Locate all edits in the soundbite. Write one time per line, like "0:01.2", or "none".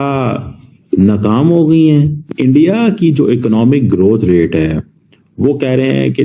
0:02.3